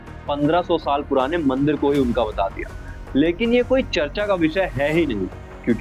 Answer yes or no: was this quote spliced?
no